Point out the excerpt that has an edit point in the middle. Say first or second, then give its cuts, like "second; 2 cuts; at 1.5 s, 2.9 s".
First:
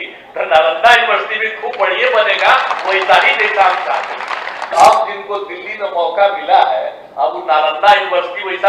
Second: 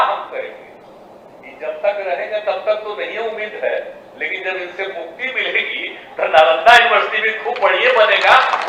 first; 1 cut; at 4.7 s